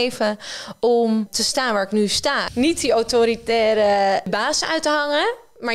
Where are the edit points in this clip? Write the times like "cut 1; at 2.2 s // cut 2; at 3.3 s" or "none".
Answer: cut 1; at 1.4 s // cut 2; at 2.4 s // cut 3; at 4.3 s